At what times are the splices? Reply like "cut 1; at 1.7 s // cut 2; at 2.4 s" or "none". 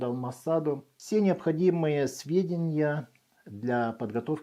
cut 1; at 0.9 s